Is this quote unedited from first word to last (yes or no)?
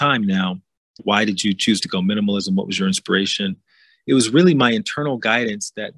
no